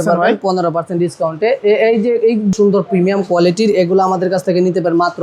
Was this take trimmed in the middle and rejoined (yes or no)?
yes